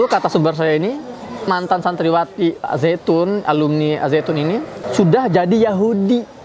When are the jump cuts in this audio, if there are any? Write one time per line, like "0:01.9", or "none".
0:01.5
0:04.7

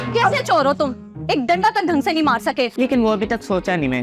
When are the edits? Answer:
0:02.7

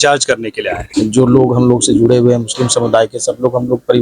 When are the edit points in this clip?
0:00.9

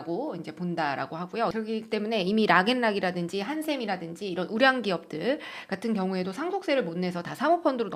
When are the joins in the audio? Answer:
0:01.5

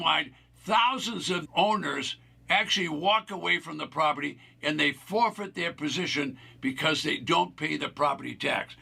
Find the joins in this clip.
0:01.4

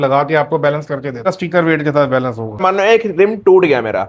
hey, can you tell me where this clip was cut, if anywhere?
0:01.3
0:02.6

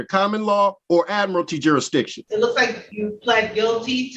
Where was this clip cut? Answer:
0:00.8
0:02.2
0:02.8

